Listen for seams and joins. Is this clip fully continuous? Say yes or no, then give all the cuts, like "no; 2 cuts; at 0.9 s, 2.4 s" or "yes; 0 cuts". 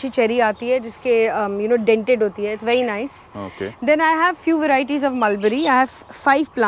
yes; 0 cuts